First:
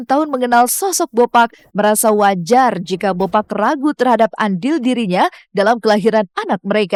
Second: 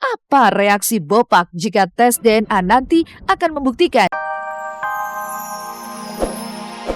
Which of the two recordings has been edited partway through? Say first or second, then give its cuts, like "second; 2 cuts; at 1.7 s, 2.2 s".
second; 1 cut; at 4.2 s